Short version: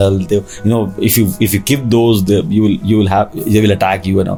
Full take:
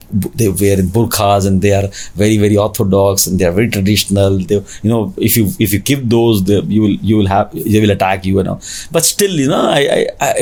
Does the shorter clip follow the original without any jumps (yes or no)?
yes